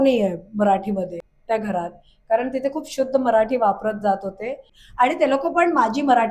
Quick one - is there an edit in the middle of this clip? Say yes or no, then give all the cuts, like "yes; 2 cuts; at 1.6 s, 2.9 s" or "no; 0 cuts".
yes; 2 cuts; at 1.3 s, 4.6 s